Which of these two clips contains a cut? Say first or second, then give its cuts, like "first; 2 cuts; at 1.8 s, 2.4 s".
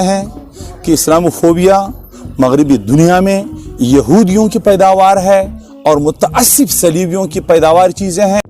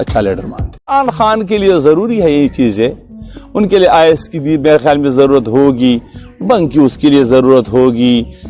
second; 1 cut; at 0.9 s